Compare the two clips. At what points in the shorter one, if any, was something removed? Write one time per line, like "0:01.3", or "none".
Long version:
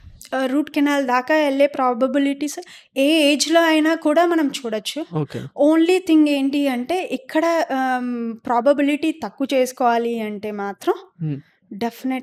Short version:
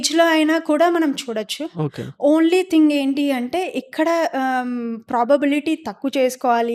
none